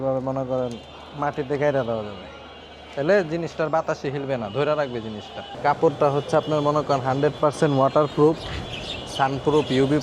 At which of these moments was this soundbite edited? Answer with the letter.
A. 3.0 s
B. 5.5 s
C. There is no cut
B